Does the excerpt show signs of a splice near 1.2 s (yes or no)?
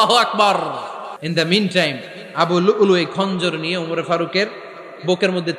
yes